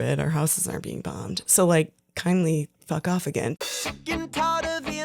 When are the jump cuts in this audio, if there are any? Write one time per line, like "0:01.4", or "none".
0:03.6